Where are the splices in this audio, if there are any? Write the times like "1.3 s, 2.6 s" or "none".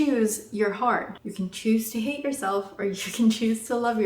1.2 s